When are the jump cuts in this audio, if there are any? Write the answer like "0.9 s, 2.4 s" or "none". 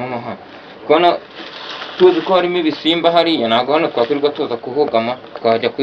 none